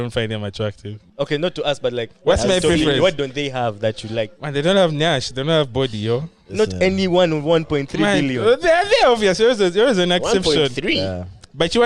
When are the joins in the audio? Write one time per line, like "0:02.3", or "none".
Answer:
0:01.0
0:04.4